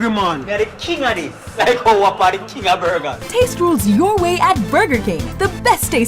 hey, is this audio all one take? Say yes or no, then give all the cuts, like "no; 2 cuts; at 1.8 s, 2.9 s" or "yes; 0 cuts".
no; 1 cut; at 3.2 s